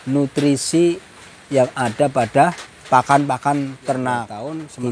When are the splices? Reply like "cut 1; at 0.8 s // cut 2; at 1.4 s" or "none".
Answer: cut 1; at 2.7 s

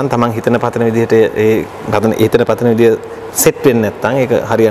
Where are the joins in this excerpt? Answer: none

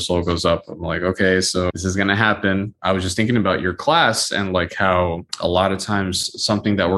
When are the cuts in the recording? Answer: cut 1; at 1.7 s // cut 2; at 2.8 s // cut 3; at 5.3 s

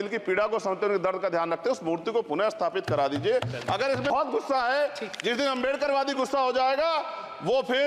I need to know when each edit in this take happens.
cut 1; at 4.1 s

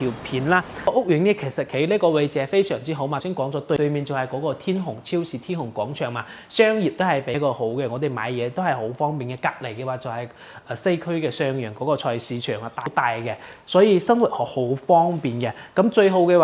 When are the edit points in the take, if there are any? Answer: cut 1; at 0.9 s // cut 2; at 3.6 s // cut 3; at 7.4 s // cut 4; at 12.9 s

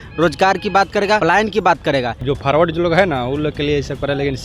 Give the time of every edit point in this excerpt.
cut 1; at 1.2 s // cut 2; at 2.2 s

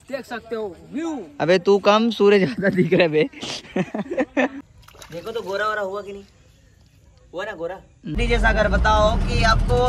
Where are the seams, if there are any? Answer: cut 1; at 4.6 s // cut 2; at 8.2 s

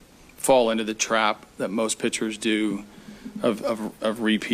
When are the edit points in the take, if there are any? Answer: none

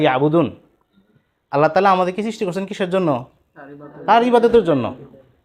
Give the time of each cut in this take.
none

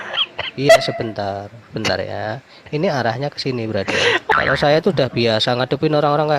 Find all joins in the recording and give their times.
cut 1; at 4.3 s

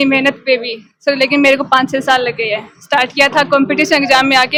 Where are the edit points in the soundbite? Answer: none

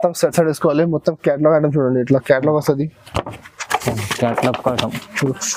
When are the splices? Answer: none

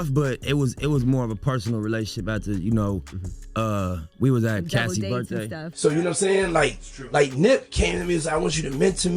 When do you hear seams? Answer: cut 1; at 5.7 s

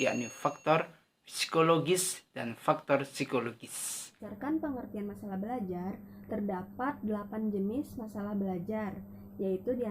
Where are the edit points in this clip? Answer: cut 1; at 4.3 s

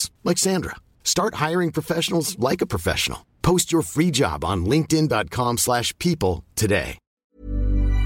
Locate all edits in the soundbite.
cut 1; at 7.0 s

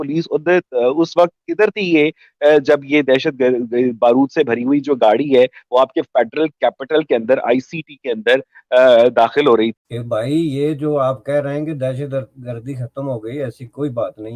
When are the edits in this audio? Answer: cut 1; at 9.8 s

